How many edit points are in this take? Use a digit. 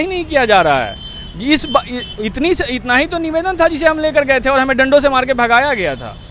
0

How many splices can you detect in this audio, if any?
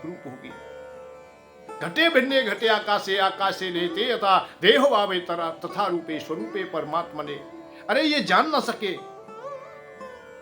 1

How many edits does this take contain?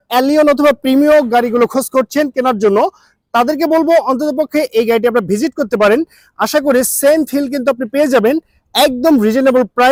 0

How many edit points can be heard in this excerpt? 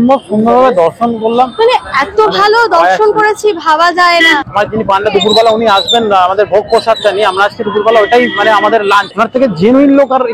2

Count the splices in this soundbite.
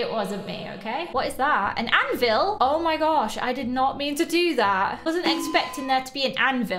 2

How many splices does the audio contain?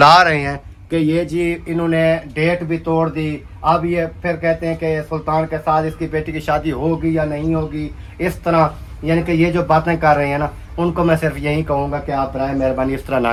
0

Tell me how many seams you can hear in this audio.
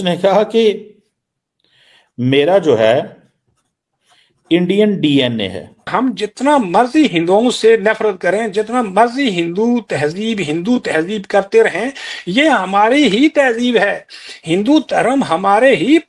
1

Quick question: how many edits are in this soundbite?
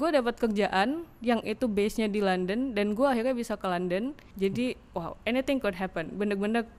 1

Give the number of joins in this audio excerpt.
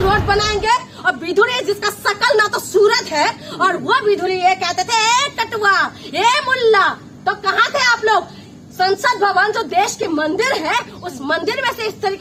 0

